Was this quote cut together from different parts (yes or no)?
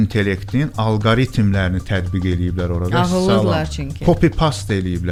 no